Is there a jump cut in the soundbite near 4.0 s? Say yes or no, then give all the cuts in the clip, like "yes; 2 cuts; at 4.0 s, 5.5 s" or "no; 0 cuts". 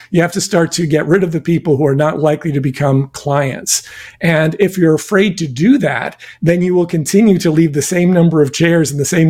no; 0 cuts